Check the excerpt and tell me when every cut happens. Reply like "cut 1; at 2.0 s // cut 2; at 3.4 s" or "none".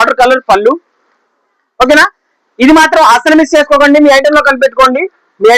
none